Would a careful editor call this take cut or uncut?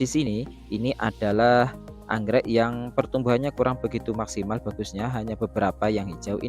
uncut